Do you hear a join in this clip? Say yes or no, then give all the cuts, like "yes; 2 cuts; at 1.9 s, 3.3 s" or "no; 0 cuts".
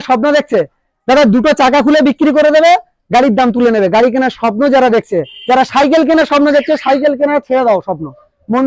no; 0 cuts